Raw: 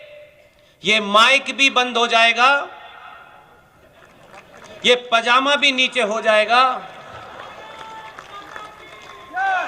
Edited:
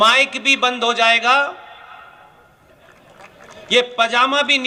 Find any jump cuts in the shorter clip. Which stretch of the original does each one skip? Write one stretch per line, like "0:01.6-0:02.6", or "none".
none